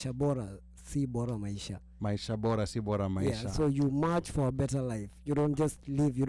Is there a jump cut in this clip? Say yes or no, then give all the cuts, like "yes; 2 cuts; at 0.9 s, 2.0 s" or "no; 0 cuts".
no; 0 cuts